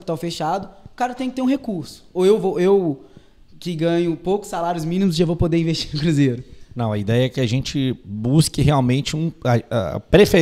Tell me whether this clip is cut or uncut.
uncut